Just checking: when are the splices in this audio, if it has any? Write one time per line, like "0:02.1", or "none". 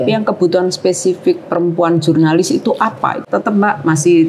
0:03.2